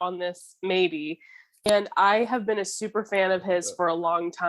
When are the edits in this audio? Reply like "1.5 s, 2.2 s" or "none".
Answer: 1.7 s